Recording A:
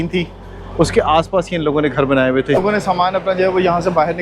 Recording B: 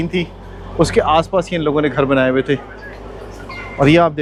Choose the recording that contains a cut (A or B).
A